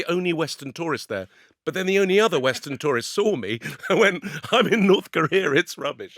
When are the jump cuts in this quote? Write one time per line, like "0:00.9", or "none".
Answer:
none